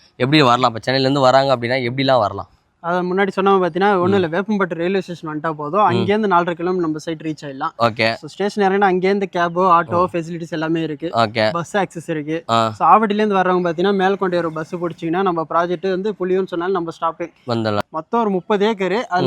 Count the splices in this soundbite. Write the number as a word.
one